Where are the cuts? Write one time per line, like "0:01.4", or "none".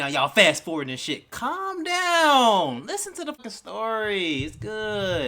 0:03.4